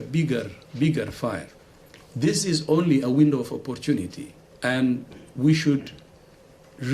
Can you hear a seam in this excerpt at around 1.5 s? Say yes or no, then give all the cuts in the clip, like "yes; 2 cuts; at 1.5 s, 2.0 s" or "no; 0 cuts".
yes; 1 cut; at 1.5 s